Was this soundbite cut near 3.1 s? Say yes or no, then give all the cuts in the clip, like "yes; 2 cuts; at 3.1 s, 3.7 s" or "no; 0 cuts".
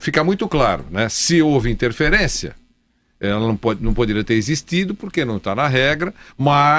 yes; 1 cut; at 3.1 s